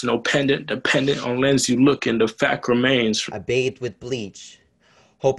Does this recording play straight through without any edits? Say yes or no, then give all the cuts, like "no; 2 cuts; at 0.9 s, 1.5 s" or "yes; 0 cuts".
no; 1 cut; at 3.3 s